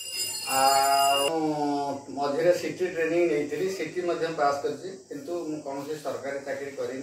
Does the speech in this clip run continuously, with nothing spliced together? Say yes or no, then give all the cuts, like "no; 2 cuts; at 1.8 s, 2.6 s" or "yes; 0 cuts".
no; 1 cut; at 1.3 s